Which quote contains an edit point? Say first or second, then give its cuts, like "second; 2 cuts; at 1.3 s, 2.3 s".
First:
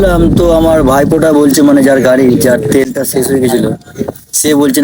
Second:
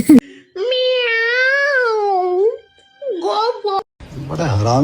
second; 1 cut; at 3.8 s